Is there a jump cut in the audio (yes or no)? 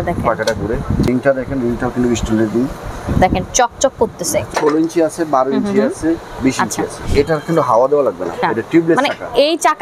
yes